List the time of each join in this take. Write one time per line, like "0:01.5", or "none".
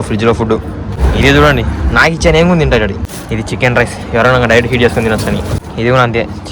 0:01.0
0:03.0
0:05.6

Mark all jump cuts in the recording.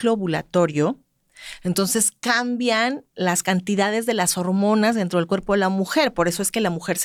none

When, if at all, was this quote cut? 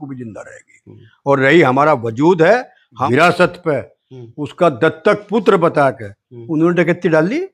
0:03.0

